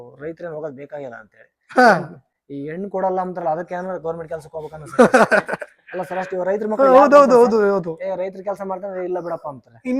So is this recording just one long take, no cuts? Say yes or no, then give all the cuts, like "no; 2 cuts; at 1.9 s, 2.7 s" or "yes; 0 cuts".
yes; 0 cuts